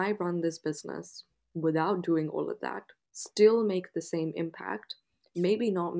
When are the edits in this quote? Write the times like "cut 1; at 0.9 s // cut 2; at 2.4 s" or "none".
none